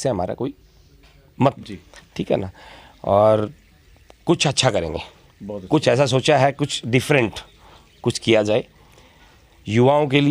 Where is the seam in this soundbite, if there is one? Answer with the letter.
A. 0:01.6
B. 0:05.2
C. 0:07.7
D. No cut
A